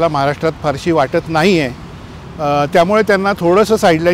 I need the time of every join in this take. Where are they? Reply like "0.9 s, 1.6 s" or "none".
none

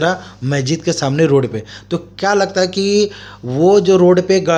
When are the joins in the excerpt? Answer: none

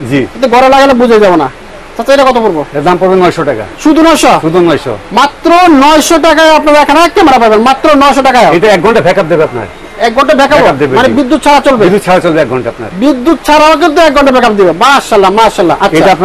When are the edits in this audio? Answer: none

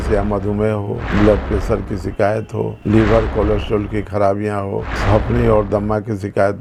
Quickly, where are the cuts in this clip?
none

